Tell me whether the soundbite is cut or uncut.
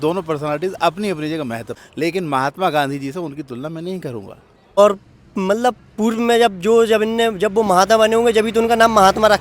cut